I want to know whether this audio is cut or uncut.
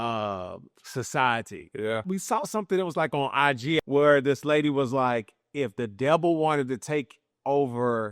cut